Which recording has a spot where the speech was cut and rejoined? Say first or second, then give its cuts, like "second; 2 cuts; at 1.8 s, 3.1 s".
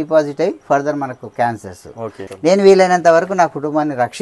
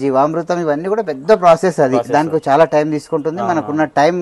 first; 1 cut; at 2.2 s